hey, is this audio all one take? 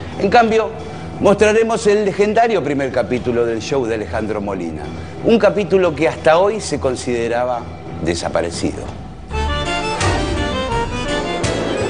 yes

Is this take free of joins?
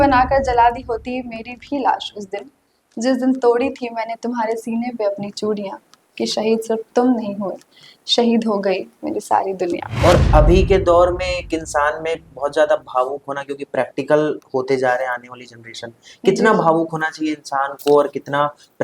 no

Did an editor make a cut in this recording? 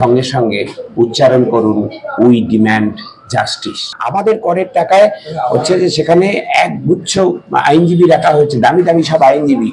yes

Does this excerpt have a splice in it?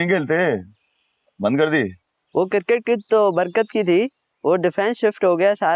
no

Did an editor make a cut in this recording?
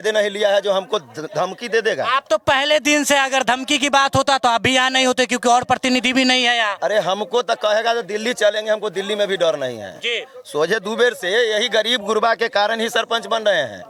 no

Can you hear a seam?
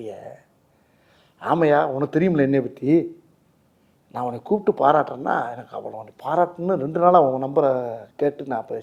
no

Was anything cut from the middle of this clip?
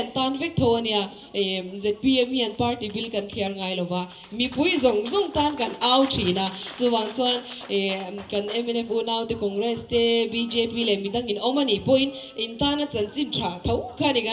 no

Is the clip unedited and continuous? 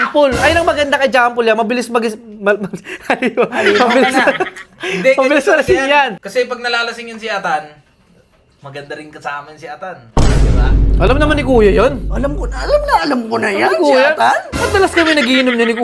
yes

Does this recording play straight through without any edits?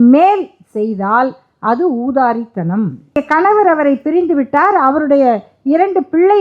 no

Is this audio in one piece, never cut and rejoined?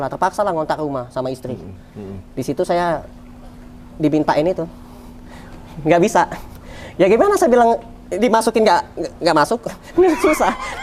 yes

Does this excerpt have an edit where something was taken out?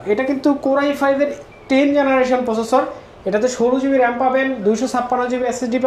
no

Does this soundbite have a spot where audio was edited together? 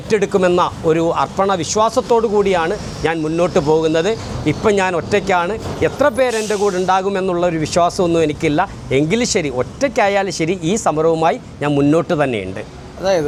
no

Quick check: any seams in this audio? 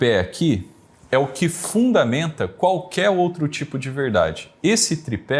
no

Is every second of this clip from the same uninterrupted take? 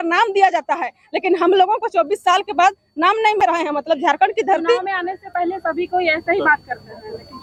yes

